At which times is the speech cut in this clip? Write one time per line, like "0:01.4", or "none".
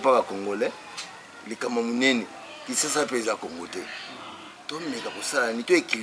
none